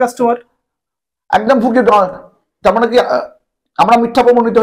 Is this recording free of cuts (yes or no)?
yes